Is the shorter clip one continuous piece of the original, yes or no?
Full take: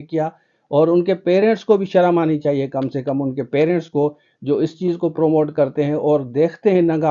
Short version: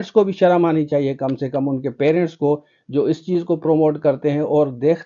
yes